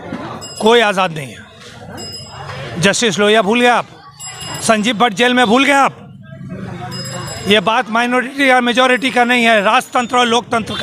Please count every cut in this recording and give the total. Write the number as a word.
zero